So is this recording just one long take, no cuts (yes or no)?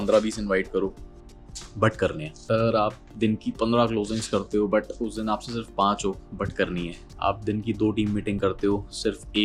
no